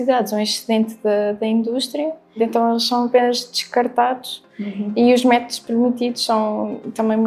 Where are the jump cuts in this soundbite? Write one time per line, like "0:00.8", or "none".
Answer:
0:02.4